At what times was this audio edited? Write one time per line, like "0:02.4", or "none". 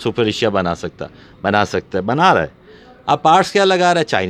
none